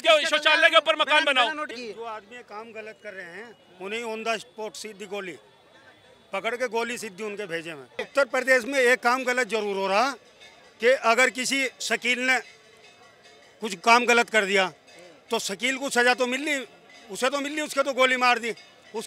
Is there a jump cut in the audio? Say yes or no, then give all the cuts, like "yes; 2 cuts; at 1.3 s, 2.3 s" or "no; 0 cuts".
yes; 2 cuts; at 1.7 s, 8.0 s